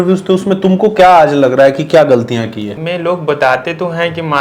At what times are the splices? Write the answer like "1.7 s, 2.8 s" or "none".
2.7 s